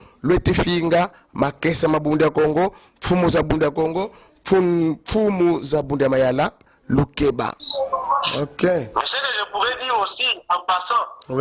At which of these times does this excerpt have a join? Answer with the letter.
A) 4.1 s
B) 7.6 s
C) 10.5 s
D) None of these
B